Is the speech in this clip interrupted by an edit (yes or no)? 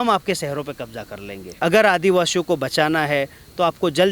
yes